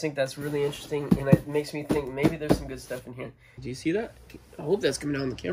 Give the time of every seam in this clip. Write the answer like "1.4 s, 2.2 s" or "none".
3.6 s